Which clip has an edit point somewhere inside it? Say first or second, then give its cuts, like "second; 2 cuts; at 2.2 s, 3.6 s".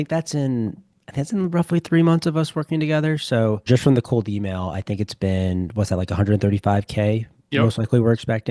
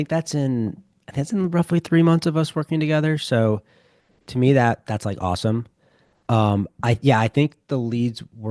first; 1 cut; at 3.7 s